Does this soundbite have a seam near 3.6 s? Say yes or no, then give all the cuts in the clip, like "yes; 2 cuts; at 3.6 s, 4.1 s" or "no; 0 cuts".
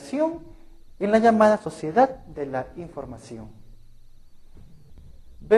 yes; 1 cut; at 3.6 s